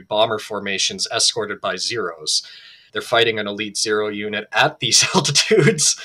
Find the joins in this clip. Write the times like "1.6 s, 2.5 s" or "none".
2.8 s